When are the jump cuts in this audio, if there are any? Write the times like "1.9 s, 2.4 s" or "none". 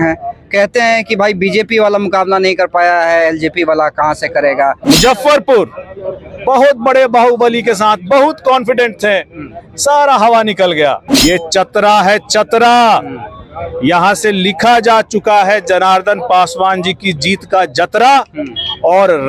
4.8 s, 11.1 s